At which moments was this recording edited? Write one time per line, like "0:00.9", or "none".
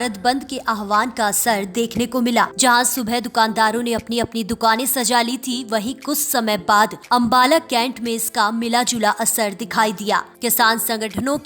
0:02.5
0:07.0
0:10.3